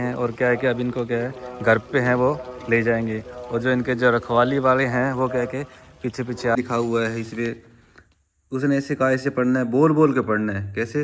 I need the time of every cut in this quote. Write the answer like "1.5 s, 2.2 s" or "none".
6.5 s